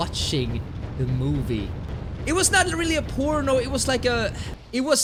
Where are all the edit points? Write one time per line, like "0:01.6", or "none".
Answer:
none